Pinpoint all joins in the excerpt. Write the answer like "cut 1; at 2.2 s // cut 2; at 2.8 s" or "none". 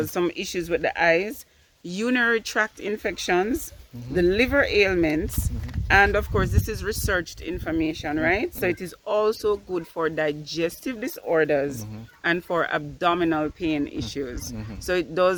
none